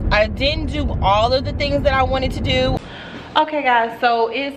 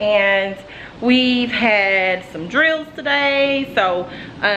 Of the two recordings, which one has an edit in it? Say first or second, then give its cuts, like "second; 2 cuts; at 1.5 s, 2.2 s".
first; 1 cut; at 2.8 s